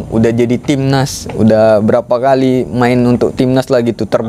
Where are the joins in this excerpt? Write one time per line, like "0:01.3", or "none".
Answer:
none